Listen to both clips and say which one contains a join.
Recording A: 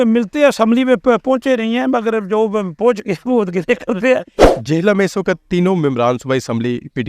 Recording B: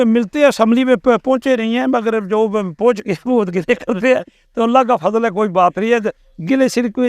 A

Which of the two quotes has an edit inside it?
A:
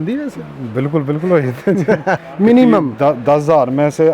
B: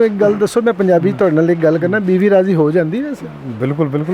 A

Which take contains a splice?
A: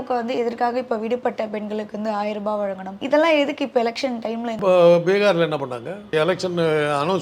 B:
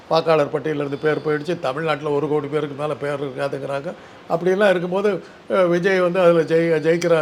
A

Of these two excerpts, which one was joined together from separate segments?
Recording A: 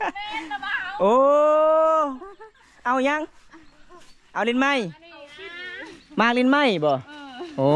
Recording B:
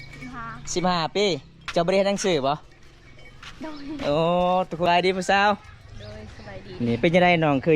B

